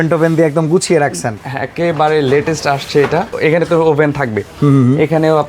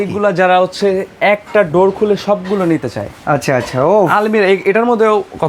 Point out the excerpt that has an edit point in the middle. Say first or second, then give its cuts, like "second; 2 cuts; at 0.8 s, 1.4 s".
first; 1 cut; at 3.3 s